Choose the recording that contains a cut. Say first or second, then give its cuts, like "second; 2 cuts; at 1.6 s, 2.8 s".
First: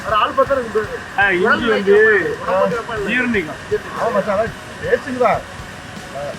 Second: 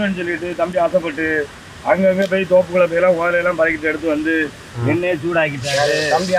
first; 1 cut; at 1.2 s